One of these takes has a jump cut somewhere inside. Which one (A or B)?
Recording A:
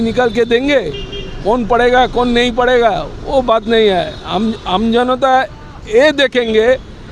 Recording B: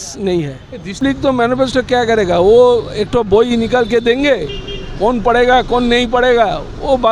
B